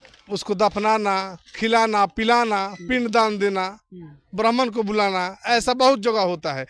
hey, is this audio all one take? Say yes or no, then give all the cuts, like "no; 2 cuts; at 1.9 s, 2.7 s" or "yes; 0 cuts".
yes; 0 cuts